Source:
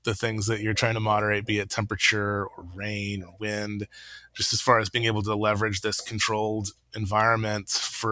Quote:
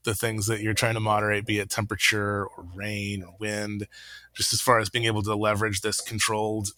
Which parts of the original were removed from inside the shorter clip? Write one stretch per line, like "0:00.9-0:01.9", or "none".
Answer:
none